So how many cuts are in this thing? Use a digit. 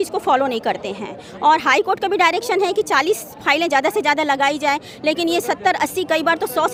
0